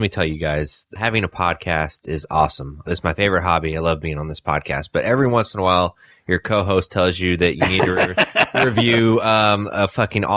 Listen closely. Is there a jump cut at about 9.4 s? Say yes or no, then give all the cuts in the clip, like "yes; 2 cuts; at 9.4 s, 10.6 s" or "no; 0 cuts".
no; 2 cuts; at 0.9 s, 2.9 s